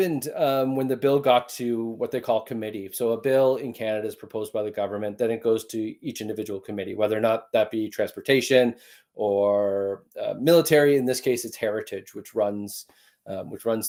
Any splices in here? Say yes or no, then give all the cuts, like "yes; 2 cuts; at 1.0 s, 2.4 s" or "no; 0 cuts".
no; 0 cuts